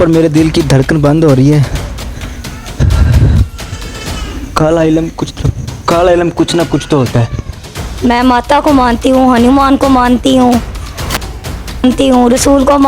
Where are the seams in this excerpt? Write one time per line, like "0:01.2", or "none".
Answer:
0:07.4